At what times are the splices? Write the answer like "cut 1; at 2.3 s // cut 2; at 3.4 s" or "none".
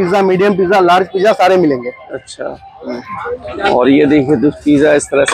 none